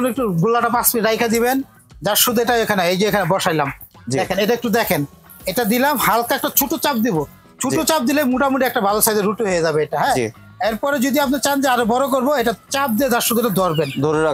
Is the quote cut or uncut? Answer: uncut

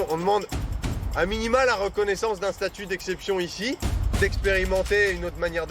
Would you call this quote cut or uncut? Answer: cut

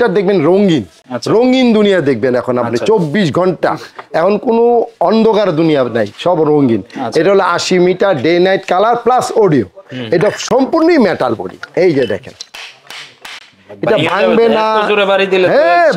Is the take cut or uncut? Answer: uncut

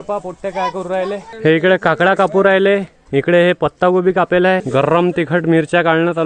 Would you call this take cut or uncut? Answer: cut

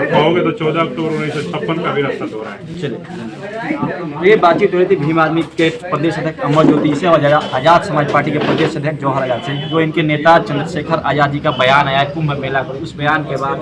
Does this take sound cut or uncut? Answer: uncut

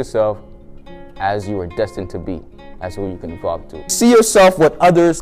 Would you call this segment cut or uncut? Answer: cut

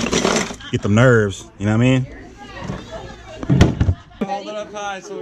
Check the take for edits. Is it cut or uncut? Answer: cut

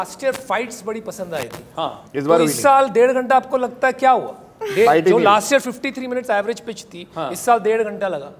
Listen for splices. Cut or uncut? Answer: uncut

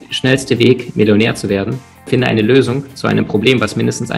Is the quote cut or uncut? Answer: uncut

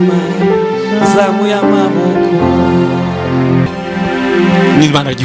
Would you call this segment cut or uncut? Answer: cut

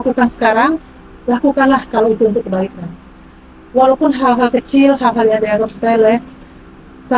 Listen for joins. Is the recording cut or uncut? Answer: uncut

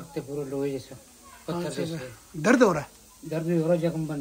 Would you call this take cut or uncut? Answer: uncut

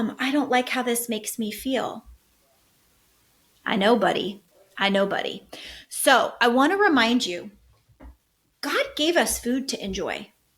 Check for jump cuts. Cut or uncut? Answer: uncut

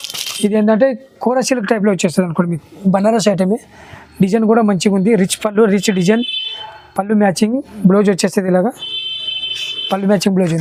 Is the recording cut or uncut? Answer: uncut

